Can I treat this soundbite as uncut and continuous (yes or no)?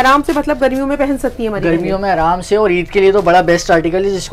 yes